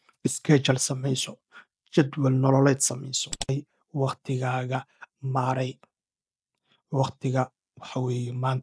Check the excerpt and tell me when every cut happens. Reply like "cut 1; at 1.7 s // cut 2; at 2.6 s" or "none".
cut 1; at 3.5 s